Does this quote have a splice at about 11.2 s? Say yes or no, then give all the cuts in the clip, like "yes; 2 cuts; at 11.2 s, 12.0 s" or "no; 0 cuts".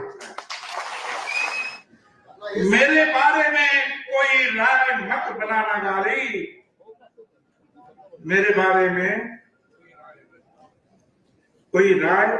no; 1 cut; at 1.6 s